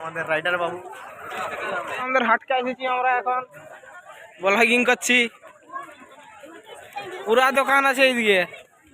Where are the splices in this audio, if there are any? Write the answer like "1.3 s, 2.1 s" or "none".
2.0 s